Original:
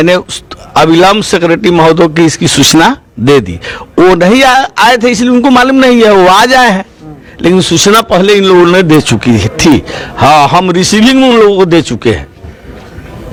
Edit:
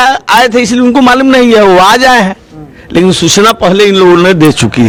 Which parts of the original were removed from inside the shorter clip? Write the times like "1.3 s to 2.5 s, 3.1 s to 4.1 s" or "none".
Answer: none